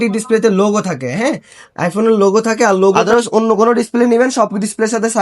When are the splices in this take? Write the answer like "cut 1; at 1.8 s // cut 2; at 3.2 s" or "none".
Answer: cut 1; at 2.9 s

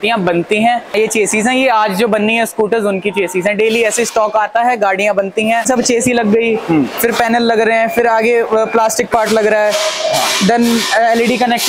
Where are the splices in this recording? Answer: cut 1; at 0.9 s // cut 2; at 5.6 s

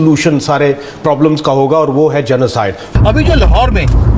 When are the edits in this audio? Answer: cut 1; at 2.8 s

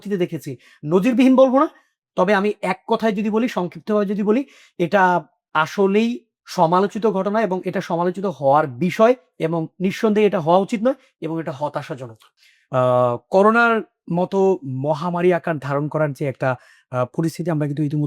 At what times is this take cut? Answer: cut 1; at 12.3 s

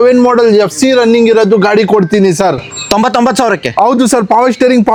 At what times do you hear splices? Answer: none

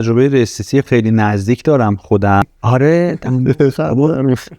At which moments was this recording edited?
cut 1; at 2.4 s

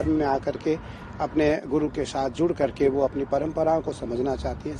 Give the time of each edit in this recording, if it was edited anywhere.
none

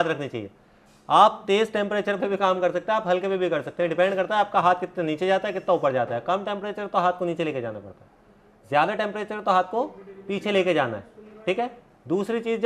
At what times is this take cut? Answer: none

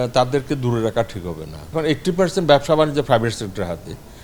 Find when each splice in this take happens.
cut 1; at 1.7 s

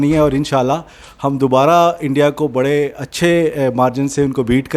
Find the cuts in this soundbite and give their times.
none

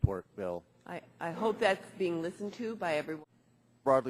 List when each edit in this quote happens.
cut 1; at 3.2 s

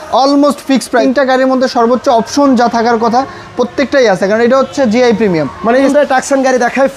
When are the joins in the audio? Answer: cut 1; at 1.0 s // cut 2; at 5.9 s

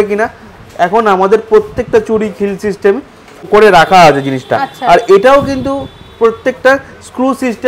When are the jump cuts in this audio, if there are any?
cut 1; at 3.5 s

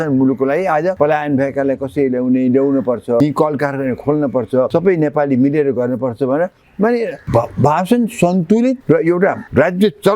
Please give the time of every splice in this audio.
cut 1; at 0.9 s // cut 2; at 3.2 s // cut 3; at 4.7 s // cut 4; at 7.2 s // cut 5; at 9.2 s

